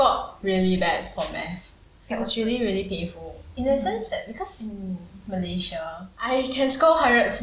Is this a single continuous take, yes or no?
no